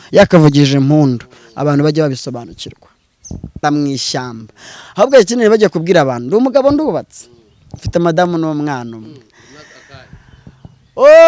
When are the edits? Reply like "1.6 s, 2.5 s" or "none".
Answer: 3.6 s